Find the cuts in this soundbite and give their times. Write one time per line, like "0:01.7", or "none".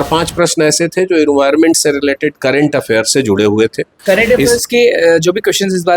0:03.9